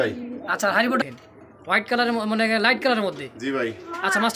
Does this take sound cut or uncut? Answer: cut